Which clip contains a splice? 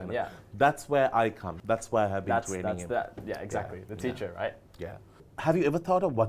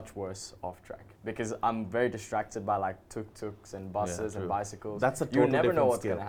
first; 2 cuts; at 1.5 s, 5.3 s

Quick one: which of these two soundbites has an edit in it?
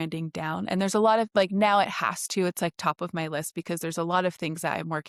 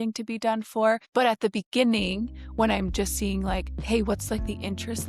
second; 2 cuts; at 1.0 s, 3.7 s

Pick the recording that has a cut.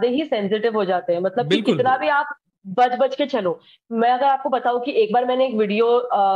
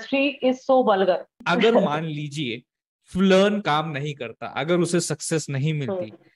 second; 1 cut; at 1.3 s

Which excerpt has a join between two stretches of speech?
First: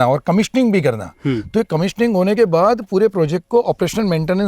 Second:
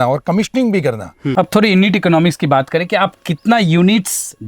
second; 1 cut; at 1.1 s

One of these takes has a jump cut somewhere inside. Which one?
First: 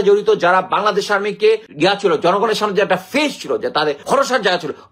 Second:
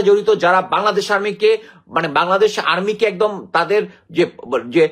first; 2 cuts; at 1.7 s, 4.0 s

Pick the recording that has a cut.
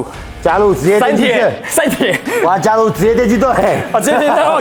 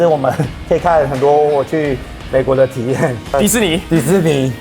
second; 1 cut; at 3.3 s

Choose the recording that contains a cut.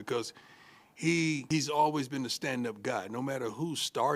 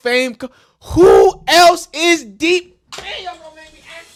first; 1 cut; at 1.4 s

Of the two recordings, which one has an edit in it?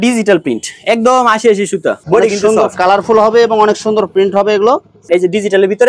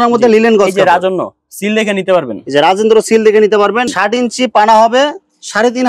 first; 2 cuts; at 2.0 s, 5.0 s

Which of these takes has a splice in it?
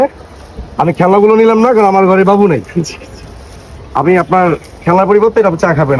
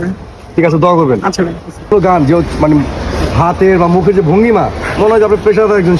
second; 1 cut; at 1.9 s

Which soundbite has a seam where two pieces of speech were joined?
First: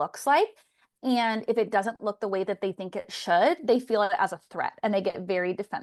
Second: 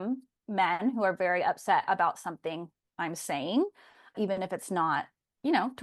second; 1 cut; at 4.2 s

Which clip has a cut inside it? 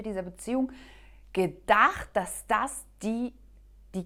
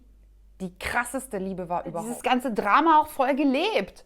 second; 1 cut; at 2.1 s

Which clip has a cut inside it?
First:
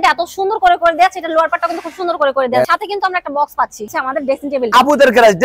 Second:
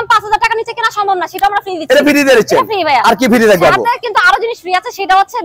first; 2 cuts; at 2.7 s, 3.9 s

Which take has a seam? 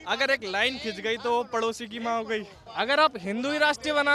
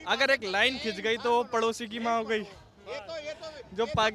first; 1 cut; at 2.6 s

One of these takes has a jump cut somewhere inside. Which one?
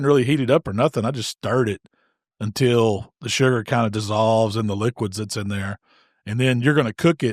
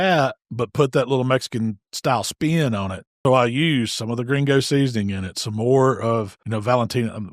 second; 2 cuts; at 3.1 s, 6.4 s

